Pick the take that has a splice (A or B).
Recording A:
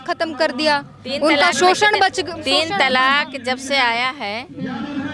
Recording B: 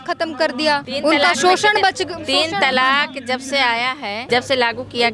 B